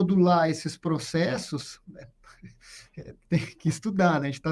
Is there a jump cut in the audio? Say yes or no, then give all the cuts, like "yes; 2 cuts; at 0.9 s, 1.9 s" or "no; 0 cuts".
no; 0 cuts